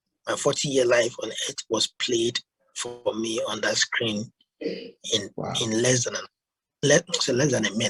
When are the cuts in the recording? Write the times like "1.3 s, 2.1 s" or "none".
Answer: none